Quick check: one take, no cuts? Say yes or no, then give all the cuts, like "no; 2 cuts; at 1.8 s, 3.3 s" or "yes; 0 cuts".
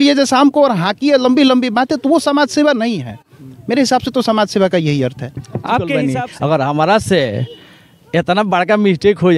no; 1 cut; at 6.1 s